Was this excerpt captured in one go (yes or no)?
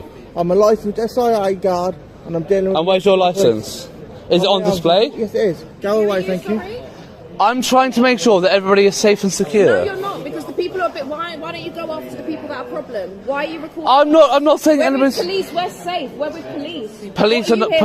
yes